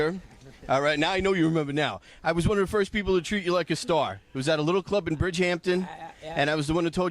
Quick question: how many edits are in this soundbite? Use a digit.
0